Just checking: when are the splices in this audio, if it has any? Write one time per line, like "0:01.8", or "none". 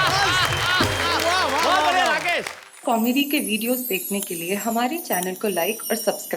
0:02.7

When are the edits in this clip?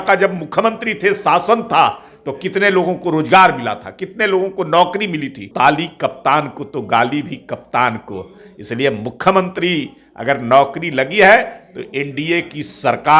0:05.5

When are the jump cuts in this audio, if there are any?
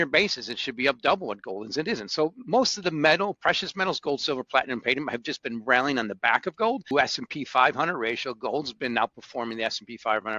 0:06.9

